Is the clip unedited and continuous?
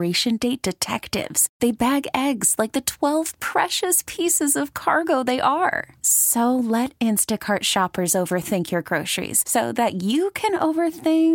yes; 0 cuts

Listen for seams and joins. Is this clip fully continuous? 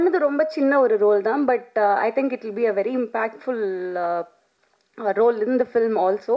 yes; 0 cuts

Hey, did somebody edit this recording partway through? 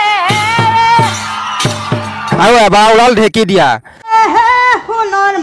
yes; 2 cuts; at 2.4 s, 4.1 s

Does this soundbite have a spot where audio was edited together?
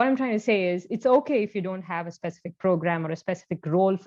no; 0 cuts

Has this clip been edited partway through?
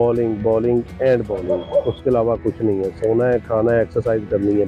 no; 0 cuts

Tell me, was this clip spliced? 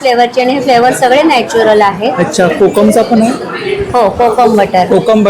no; 0 cuts

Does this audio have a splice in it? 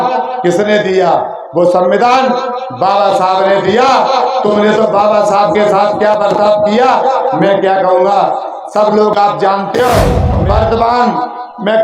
yes; 1 cut; at 10.3 s

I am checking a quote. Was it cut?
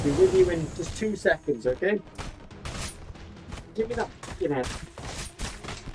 no; 0 cuts

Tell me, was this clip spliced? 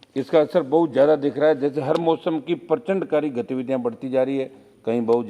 no; 0 cuts

